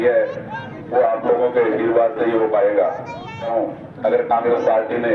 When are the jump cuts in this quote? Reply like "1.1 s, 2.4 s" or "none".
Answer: 3.5 s

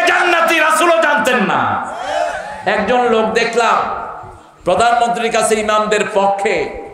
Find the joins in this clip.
2.4 s

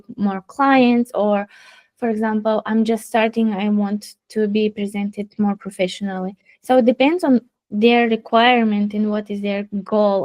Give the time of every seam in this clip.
none

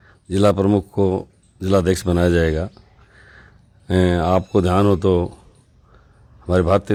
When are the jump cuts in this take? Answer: none

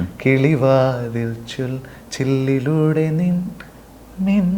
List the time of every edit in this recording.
none

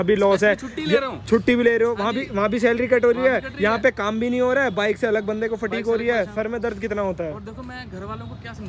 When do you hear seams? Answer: none

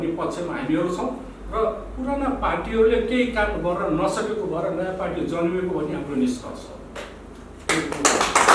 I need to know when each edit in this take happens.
none

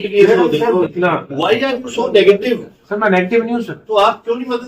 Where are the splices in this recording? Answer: 0.9 s

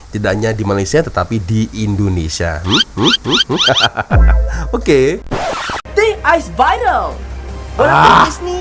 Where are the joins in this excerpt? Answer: 5.5 s

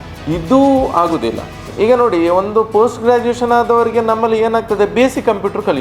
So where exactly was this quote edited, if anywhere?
1.7 s

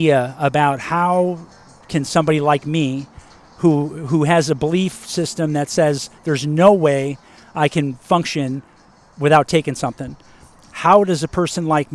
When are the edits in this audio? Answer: none

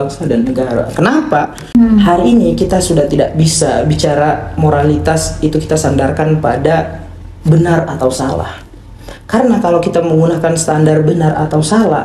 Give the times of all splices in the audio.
1.6 s

